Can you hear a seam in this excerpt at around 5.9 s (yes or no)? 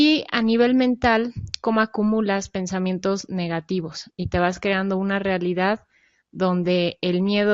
yes